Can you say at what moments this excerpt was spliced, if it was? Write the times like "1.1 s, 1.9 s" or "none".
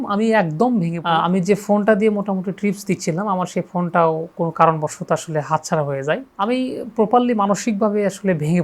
1.0 s, 6.3 s